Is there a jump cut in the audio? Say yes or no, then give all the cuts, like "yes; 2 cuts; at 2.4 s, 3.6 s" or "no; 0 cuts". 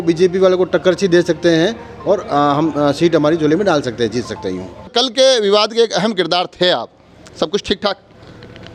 no; 0 cuts